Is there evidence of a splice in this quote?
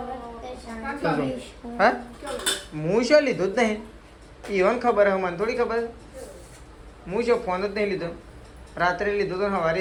no; 0 cuts

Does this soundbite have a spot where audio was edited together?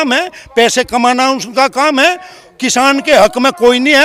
no; 0 cuts

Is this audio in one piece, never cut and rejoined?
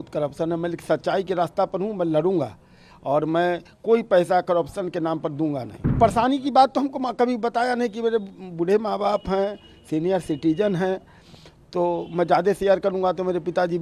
no; 1 cut; at 5.8 s

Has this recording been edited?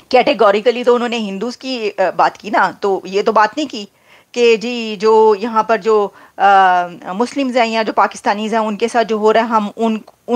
no; 0 cuts

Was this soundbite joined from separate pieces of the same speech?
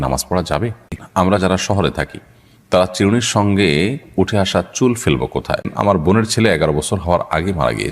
yes; 2 cuts; at 1.0 s, 5.7 s

